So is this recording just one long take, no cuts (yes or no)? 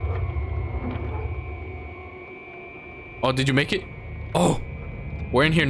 yes